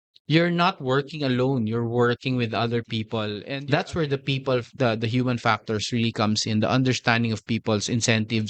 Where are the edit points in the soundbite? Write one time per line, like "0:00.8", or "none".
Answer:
0:03.4